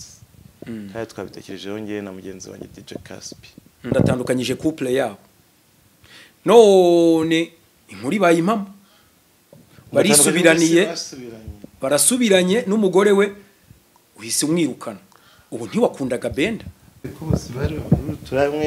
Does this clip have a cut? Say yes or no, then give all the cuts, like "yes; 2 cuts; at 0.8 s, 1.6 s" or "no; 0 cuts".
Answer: yes; 2 cuts; at 3.9 s, 17.1 s